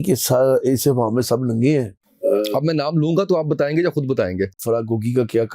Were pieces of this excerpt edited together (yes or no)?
yes